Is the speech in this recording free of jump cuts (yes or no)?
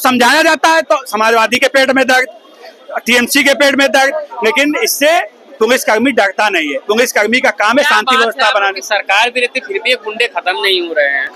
yes